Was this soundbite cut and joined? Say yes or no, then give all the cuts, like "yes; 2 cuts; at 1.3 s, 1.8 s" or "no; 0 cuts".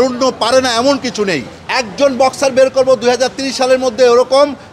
yes; 1 cut; at 1.5 s